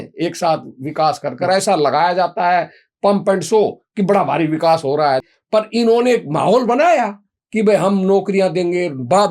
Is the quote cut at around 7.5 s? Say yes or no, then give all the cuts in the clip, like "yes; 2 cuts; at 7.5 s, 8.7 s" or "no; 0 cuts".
no; 1 cut; at 5.2 s